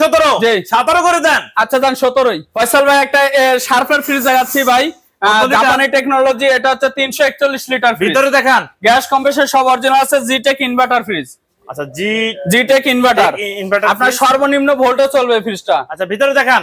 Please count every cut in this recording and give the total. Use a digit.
0